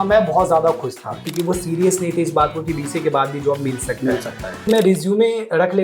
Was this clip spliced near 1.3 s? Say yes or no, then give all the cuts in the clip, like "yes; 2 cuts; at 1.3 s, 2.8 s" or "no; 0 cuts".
yes; 2 cuts; at 1.3 s, 4.7 s